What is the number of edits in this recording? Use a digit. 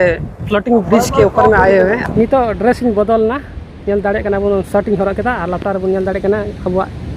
1